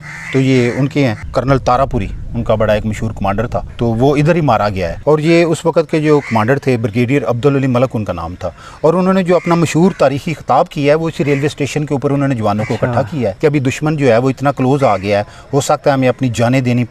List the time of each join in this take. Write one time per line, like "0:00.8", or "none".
0:01.2
0:03.7
0:04.9
0:13.4